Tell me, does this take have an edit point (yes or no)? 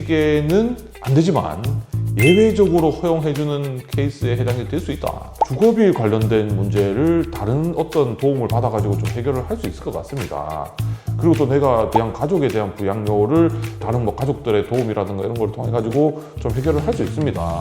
yes